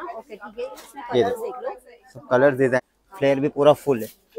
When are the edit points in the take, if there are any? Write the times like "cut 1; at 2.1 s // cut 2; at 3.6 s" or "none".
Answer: cut 1; at 2.8 s